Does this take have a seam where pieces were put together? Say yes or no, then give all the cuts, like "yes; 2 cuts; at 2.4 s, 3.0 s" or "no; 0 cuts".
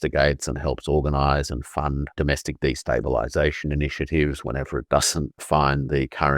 yes; 2 cuts; at 2.1 s, 5.4 s